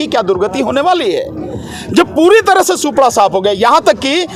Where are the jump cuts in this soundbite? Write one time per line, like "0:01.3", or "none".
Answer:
none